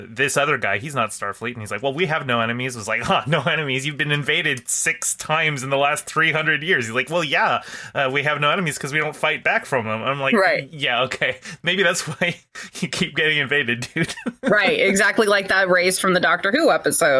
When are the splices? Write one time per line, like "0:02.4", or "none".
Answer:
none